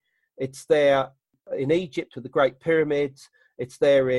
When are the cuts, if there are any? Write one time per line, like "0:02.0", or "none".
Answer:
0:01.3